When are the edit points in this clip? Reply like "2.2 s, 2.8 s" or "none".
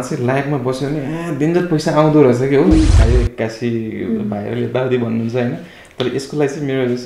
3.0 s